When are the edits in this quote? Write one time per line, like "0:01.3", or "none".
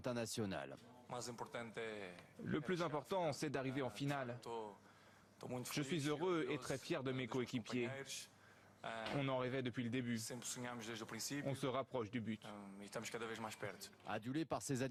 none